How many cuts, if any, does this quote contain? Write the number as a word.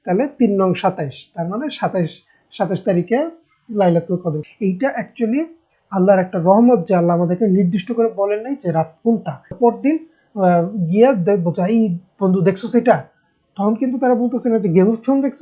two